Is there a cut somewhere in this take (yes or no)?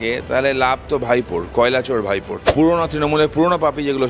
yes